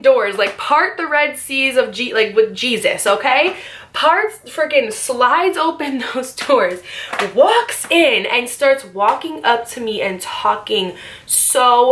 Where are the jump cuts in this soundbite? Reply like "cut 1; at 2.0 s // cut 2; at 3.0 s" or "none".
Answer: none

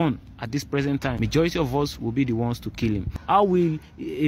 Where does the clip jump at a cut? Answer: cut 1; at 1.1 s // cut 2; at 3.1 s

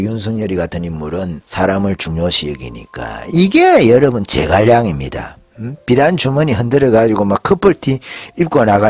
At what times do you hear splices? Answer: cut 1; at 1.4 s

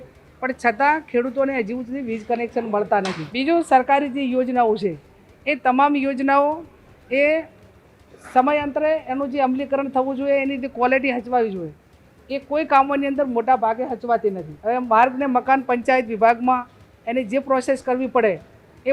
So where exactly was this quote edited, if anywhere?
cut 1; at 3.2 s // cut 2; at 14.5 s

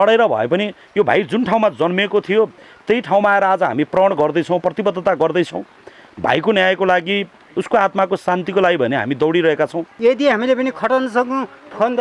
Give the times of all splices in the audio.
cut 1; at 9.9 s

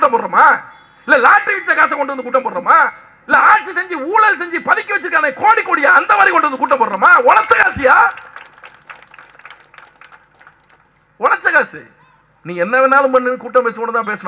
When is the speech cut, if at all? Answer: none

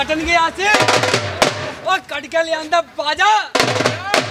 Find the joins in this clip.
none

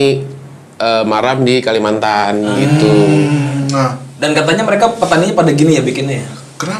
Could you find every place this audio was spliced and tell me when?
none

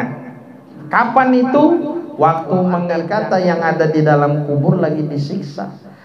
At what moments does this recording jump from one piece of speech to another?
cut 1; at 3.0 s

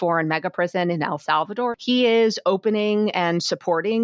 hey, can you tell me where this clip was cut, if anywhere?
cut 1; at 1.8 s

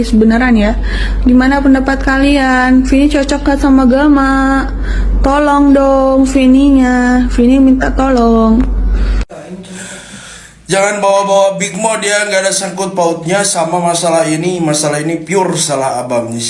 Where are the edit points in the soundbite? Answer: none

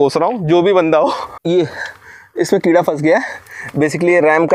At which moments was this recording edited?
cut 1; at 1.3 s

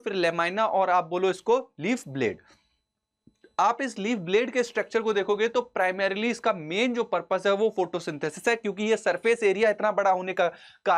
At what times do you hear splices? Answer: none

